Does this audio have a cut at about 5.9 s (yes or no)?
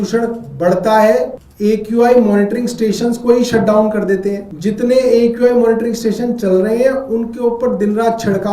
no